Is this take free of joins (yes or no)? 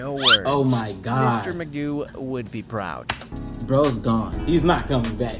yes